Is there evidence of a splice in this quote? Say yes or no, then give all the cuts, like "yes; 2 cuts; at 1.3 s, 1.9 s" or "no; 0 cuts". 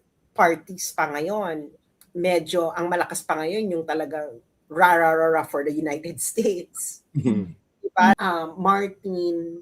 yes; 1 cut; at 8.2 s